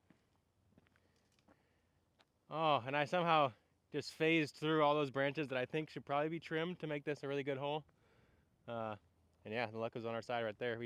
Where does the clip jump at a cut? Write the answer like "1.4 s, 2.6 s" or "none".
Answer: none